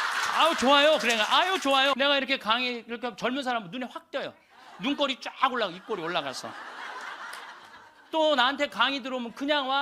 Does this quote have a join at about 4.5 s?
no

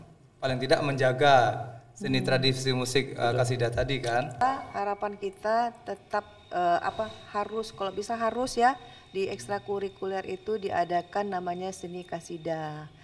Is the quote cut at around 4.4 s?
yes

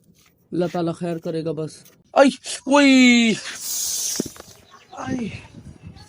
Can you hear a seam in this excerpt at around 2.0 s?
yes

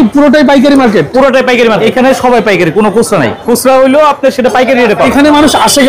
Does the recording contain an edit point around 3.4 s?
yes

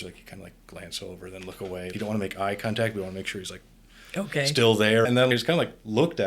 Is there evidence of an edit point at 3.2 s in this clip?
no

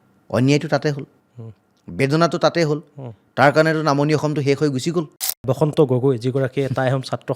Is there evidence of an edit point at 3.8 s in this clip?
no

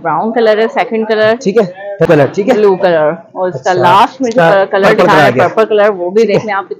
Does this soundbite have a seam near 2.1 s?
yes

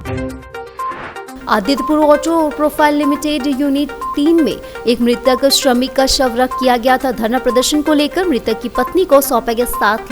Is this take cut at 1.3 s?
yes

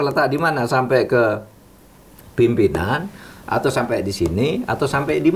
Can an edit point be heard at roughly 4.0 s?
no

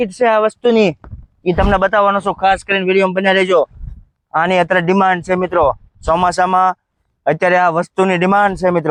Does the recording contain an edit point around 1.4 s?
no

